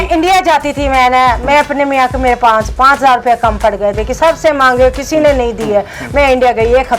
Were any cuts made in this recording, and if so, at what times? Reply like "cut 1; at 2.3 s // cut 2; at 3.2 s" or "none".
none